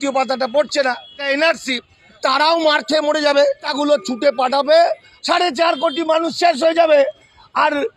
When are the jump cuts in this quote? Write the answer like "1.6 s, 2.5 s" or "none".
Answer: 1.2 s, 2.2 s, 3.7 s, 5.1 s